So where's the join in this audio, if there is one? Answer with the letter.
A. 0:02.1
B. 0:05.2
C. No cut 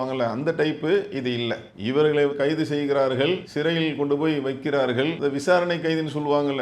B